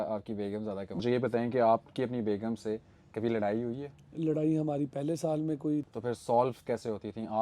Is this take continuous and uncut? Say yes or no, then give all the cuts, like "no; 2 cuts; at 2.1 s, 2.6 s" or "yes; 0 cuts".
no; 2 cuts; at 1.0 s, 5.9 s